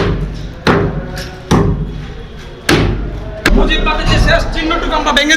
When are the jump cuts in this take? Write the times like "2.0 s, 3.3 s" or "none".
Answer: 3.5 s

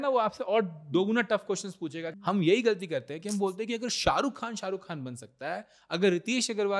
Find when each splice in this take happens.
2.1 s

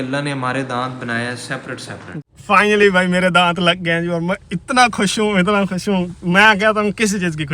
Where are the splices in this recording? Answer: 2.1 s

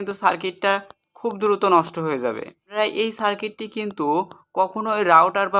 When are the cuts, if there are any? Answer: 2.7 s

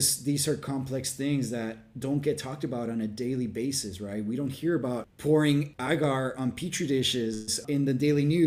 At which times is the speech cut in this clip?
5.1 s, 5.7 s, 7.5 s

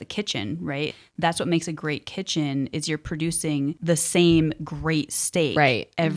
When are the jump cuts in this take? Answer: 3.8 s

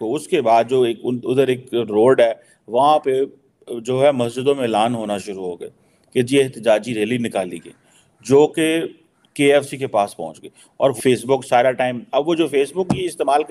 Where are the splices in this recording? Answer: 11.0 s

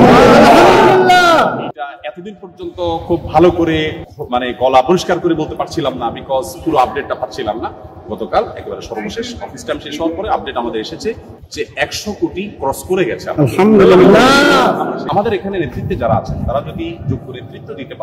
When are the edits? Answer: 15.0 s

